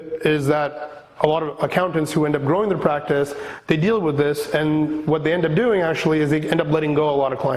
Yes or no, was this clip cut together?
no